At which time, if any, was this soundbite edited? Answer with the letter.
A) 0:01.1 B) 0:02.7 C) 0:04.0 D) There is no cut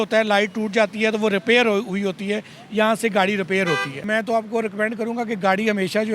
C